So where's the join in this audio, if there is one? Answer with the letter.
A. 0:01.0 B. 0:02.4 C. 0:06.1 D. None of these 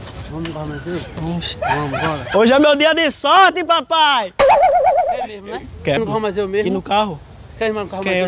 C